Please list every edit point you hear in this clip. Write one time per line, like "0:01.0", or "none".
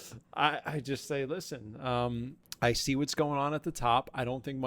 0:02.4